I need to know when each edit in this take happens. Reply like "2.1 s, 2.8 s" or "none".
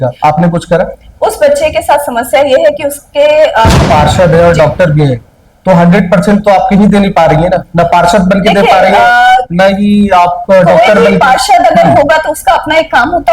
3.8 s